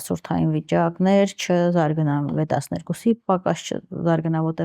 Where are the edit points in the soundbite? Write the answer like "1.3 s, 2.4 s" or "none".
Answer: none

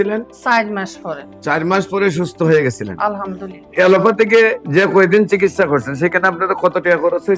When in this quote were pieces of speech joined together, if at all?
3.7 s

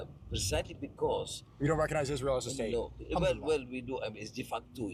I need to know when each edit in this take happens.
none

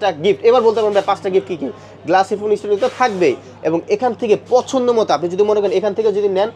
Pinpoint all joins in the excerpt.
none

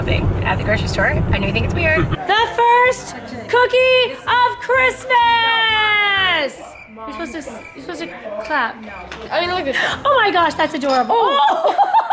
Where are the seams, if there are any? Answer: 2.1 s, 9.1 s

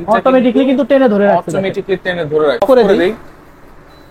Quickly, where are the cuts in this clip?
2.6 s

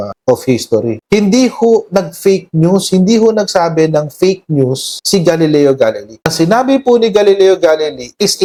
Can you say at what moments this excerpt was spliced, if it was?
none

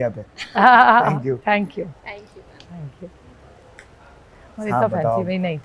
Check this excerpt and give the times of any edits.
none

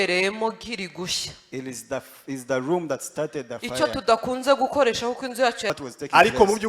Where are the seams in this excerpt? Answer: 5.7 s

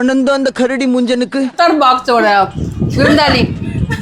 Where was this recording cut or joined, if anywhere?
1.5 s

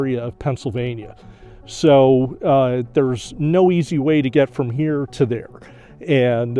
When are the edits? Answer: none

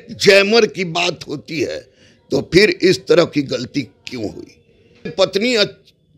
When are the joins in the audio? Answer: 5.1 s

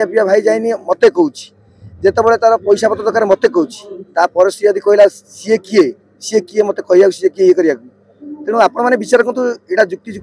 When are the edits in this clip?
none

